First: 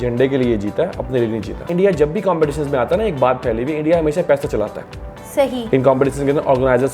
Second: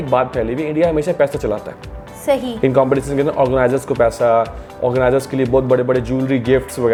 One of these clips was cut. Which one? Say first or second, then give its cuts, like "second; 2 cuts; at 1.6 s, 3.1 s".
first; 1 cut; at 1.6 s